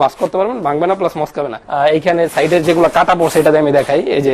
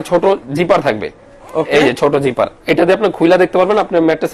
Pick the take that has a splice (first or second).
first